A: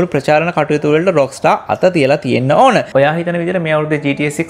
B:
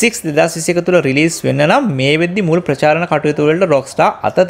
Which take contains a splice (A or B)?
A